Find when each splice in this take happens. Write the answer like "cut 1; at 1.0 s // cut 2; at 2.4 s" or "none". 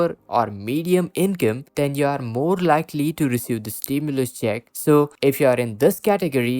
cut 1; at 4.7 s